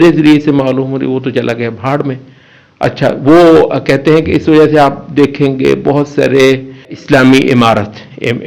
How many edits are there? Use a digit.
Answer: 0